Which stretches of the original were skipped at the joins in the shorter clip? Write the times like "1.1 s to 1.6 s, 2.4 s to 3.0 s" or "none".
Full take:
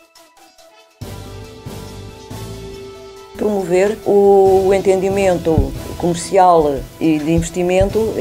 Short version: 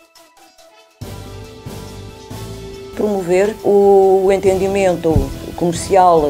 2.9 s to 3.3 s